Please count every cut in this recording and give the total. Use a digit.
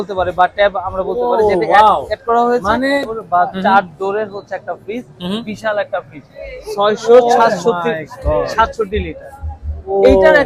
1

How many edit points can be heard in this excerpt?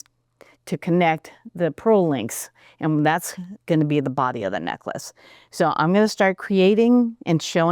1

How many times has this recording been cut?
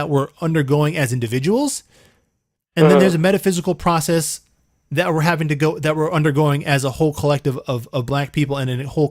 0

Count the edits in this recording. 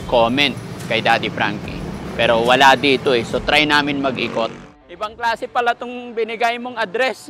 1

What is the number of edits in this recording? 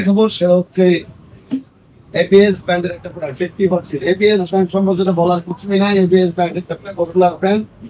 0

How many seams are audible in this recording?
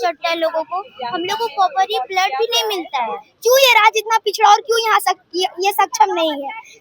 1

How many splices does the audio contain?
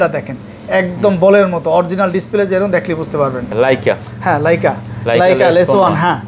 1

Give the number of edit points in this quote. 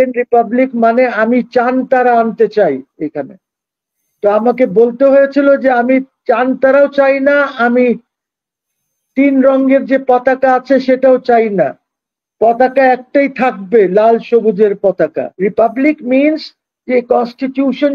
1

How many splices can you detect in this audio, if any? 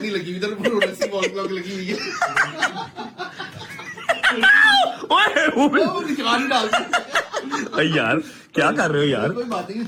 0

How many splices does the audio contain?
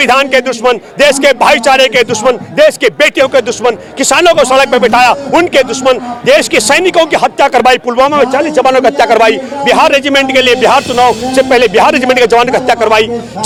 0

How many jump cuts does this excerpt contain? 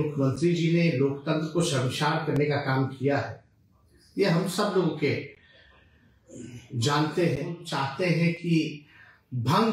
1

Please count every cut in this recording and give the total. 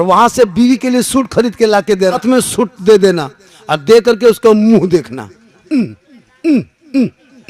1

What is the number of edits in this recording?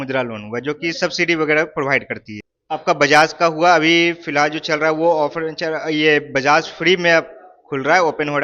1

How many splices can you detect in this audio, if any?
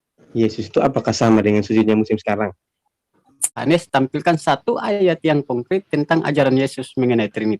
1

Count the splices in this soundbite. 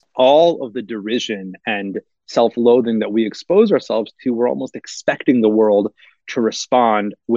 0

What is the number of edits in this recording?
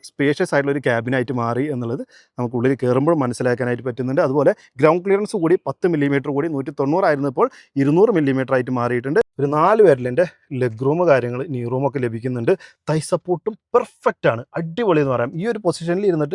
1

